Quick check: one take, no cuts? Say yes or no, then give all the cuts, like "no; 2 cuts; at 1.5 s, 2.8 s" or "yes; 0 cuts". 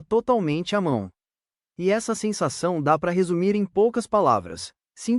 yes; 0 cuts